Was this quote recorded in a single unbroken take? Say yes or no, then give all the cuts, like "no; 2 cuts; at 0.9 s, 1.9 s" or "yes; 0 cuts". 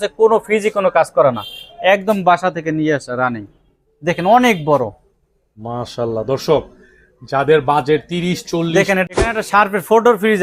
no; 1 cut; at 9.0 s